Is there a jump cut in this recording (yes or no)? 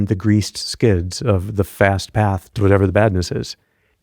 yes